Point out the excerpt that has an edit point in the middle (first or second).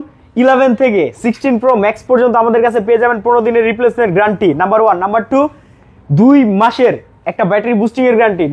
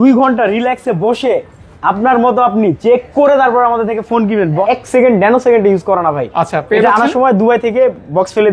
second